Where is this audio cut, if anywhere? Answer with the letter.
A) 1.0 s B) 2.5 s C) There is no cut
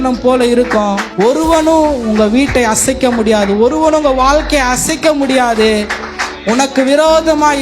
A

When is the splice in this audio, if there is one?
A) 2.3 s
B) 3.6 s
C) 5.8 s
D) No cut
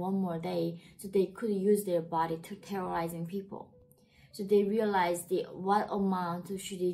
D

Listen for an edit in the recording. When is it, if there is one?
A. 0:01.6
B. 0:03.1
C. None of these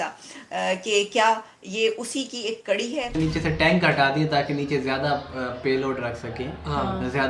B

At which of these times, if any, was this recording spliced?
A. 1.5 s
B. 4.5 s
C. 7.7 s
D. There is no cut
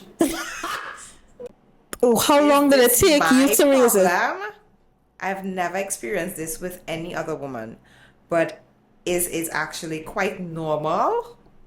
A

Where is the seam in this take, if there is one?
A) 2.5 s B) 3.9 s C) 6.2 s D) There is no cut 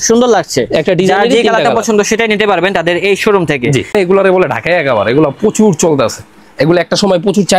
B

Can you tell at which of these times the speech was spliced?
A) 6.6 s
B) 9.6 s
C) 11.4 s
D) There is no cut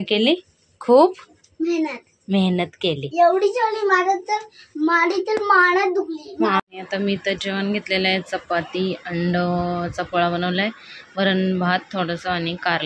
A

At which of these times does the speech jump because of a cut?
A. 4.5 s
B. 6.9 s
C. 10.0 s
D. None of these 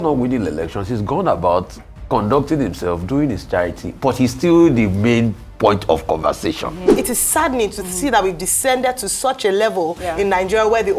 B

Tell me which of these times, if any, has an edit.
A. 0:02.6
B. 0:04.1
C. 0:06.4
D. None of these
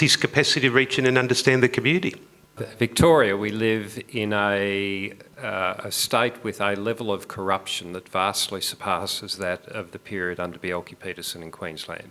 A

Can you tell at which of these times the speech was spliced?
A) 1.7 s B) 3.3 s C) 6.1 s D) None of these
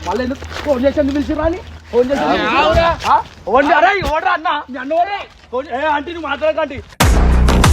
A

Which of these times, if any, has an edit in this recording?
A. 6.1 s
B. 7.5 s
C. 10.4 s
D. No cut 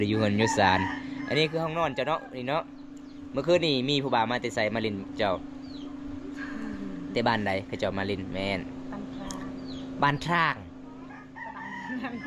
D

